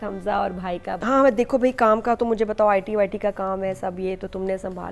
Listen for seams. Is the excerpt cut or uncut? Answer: cut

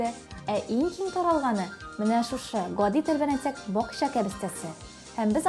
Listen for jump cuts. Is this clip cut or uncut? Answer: uncut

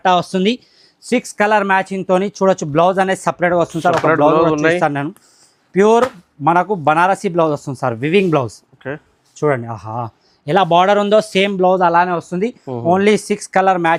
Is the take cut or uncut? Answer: uncut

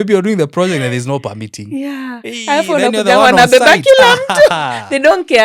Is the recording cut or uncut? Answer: uncut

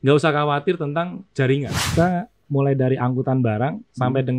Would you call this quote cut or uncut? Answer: cut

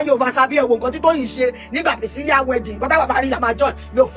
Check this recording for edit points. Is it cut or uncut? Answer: uncut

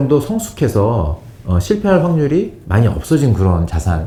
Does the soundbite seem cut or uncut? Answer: uncut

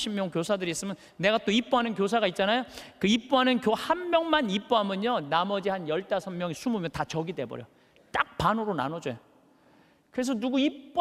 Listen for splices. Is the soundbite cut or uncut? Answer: uncut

